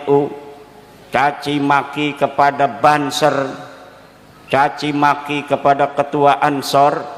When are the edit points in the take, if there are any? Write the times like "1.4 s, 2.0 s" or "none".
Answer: none